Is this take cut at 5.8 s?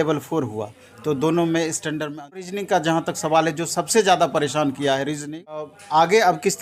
yes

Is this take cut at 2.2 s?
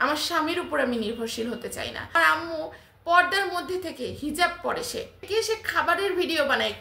yes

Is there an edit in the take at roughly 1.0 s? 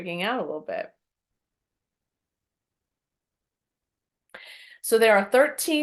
no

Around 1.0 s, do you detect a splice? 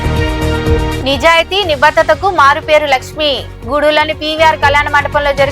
yes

